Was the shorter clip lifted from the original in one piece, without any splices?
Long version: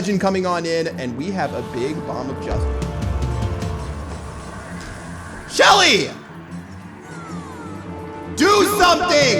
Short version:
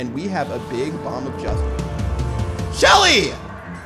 no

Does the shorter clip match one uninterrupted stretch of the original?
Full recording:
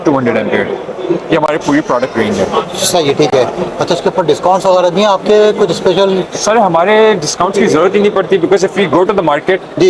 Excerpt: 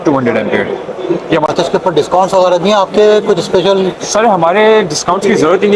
no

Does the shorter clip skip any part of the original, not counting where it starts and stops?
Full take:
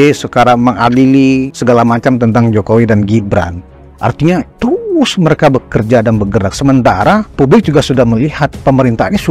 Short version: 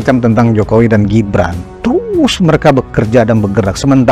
yes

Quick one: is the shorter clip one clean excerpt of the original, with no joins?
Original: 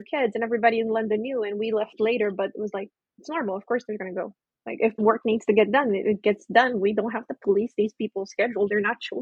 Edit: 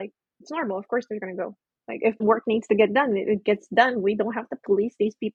yes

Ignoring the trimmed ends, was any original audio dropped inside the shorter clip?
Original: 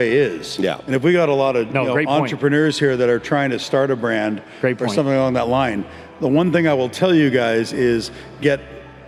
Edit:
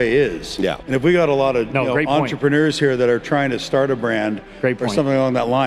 no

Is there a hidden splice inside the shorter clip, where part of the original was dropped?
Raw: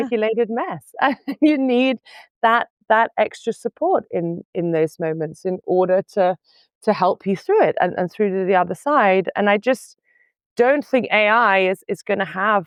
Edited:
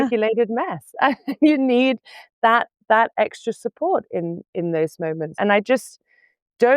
yes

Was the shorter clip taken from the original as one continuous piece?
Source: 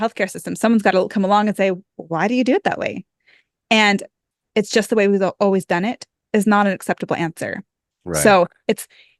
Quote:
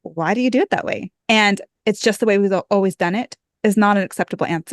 no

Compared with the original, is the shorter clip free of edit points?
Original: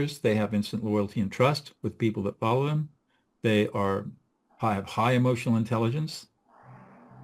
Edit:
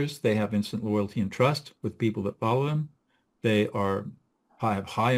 yes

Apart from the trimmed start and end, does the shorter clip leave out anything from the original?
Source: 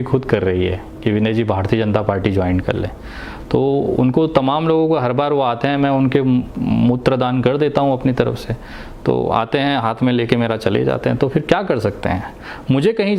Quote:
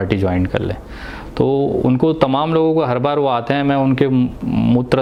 no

